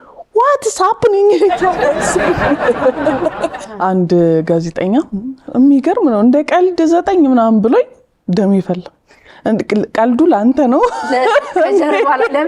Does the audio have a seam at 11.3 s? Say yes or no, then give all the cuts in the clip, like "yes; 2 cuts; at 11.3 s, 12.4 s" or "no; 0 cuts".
no; 1 cut; at 3.5 s